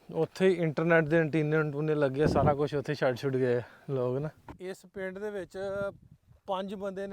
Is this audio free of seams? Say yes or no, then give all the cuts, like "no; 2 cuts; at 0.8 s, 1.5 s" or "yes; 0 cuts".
no; 1 cut; at 4.5 s